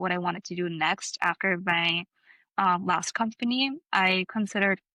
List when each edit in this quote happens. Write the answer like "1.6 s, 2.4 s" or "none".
none